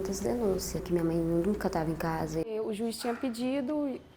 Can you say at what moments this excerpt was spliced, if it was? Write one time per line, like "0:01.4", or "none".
0:02.5

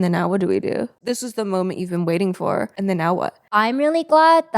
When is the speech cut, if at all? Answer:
0:01.0
0:03.1

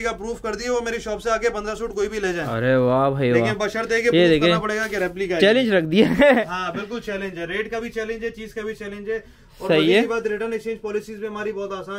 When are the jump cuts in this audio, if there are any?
none

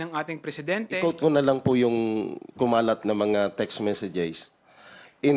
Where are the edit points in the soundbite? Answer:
0:01.0

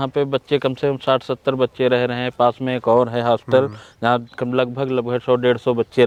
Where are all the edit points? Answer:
none

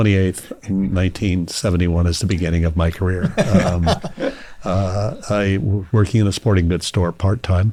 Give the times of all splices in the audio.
none

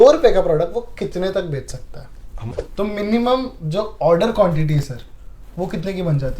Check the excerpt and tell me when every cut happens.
0:02.5

